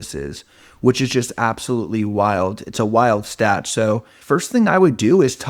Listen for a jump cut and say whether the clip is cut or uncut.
cut